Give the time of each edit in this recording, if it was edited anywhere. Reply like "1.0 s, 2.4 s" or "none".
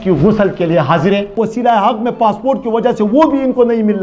1.3 s